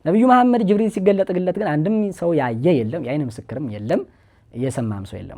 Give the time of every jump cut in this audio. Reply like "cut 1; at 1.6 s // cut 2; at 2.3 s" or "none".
none